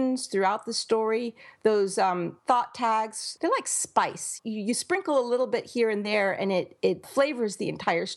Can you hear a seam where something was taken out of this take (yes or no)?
yes